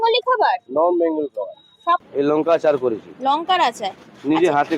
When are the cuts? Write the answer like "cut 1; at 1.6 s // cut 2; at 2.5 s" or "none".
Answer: cut 1; at 2.1 s